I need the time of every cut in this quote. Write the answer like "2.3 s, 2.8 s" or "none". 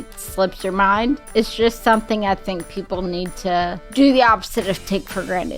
1.2 s, 3.8 s